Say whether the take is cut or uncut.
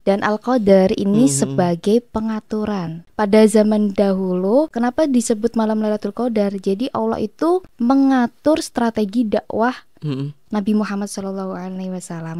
cut